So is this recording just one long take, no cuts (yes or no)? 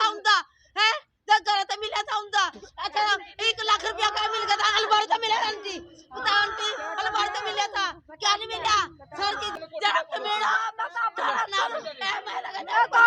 no